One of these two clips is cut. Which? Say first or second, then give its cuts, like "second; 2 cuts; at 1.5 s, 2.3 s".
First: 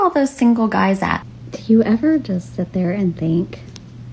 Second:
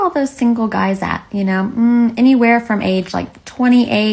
first; 1 cut; at 1.2 s